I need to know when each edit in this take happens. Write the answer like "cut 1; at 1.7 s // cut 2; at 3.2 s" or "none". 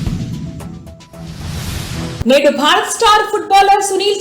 cut 1; at 2.2 s